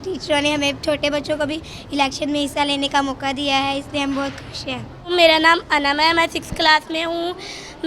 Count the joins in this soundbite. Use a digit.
0